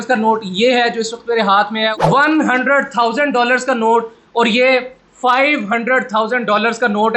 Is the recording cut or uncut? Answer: uncut